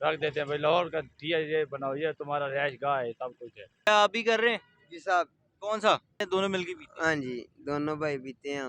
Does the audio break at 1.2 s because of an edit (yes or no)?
no